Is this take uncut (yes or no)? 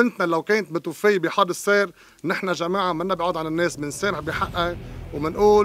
yes